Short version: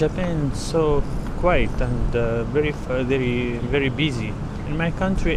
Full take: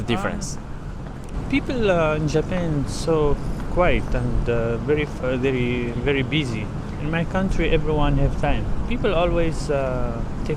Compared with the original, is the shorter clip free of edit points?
yes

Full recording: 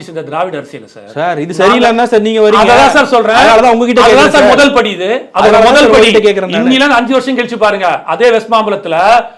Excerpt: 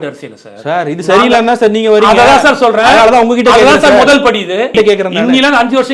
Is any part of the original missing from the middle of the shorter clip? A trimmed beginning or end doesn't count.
yes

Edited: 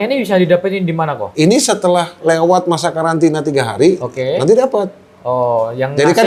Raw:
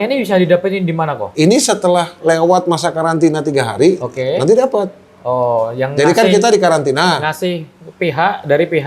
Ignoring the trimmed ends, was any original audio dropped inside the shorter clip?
no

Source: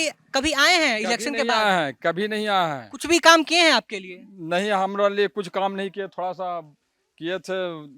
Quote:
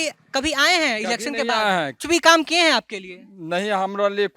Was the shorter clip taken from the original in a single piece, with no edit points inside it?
no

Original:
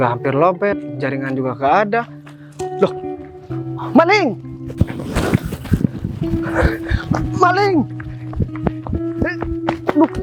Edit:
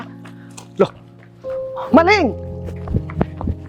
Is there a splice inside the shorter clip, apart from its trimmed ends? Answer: yes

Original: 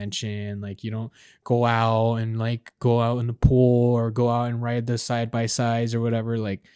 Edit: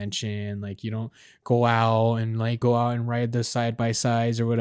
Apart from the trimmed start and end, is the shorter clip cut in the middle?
yes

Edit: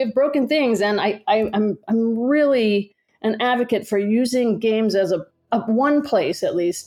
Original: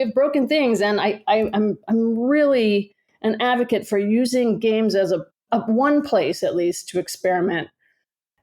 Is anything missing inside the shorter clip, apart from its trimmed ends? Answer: no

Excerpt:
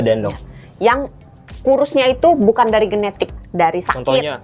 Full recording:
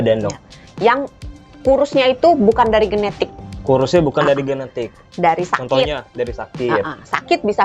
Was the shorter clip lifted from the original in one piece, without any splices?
no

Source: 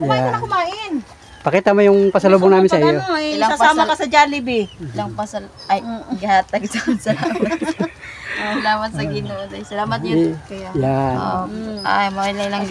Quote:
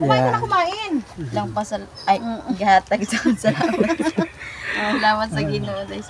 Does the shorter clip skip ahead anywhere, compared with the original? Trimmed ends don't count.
yes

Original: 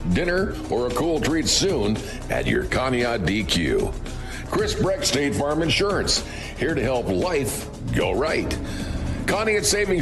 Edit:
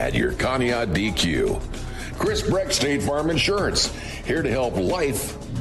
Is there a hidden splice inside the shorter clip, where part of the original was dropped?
no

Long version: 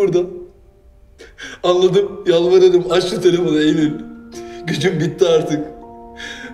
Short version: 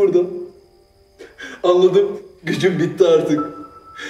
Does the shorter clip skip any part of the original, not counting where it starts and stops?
yes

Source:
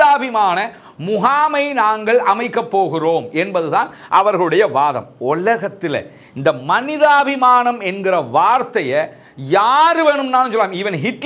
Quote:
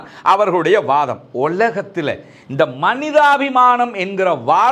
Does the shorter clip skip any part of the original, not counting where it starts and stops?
no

